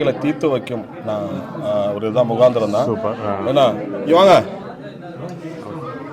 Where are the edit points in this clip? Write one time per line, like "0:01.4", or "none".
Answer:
none